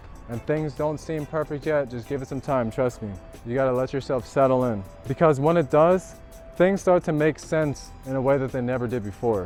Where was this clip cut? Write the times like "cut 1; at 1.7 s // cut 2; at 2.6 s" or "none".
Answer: none